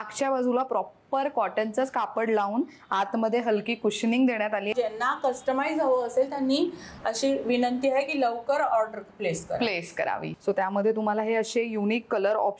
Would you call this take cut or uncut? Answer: cut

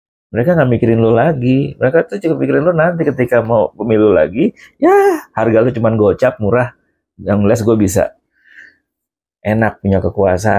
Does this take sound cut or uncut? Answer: uncut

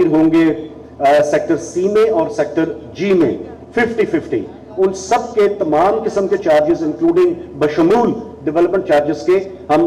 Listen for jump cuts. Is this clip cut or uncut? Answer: uncut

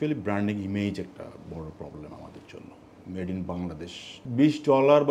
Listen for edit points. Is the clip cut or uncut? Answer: uncut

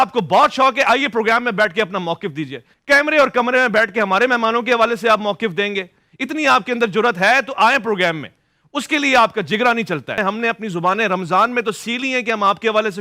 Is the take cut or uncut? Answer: uncut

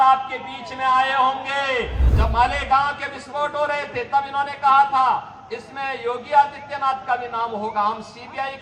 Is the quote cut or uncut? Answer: cut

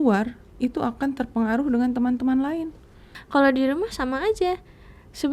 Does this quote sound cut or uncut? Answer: cut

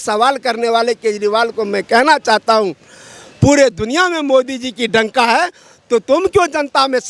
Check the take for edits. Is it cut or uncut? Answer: uncut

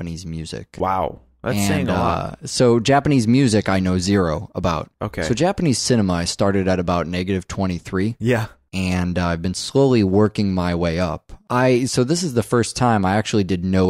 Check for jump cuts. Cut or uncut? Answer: uncut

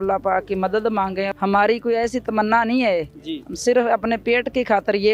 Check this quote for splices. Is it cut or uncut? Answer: cut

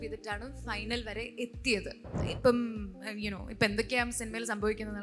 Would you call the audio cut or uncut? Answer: cut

